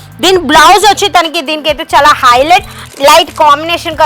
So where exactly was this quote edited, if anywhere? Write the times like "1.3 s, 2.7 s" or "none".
2.8 s